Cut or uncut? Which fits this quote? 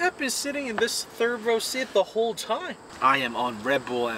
cut